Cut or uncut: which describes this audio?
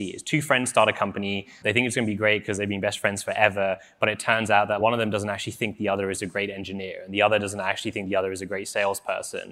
uncut